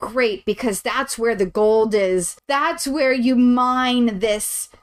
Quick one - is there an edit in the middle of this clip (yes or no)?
yes